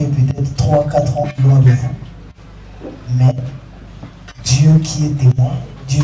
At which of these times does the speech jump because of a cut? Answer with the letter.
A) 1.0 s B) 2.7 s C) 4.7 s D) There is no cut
D